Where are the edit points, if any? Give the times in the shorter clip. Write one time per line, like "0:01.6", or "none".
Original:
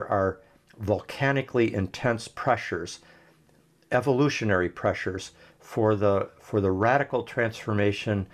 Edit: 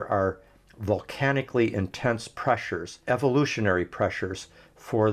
0:02.9